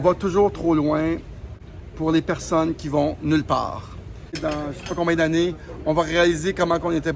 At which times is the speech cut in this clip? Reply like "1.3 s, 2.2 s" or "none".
1.5 s, 4.4 s